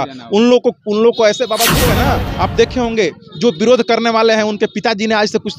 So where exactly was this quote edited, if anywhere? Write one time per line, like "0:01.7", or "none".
0:01.9